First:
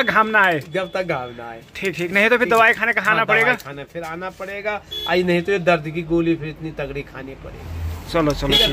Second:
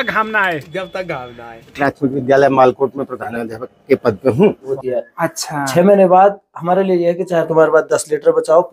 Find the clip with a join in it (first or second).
second